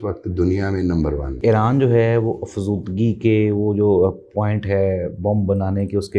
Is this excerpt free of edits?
no; 1 cut; at 1.4 s

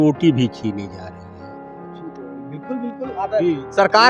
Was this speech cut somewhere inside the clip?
no; 0 cuts

